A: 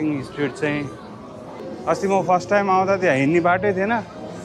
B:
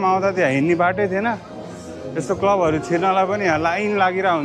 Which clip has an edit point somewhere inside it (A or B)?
A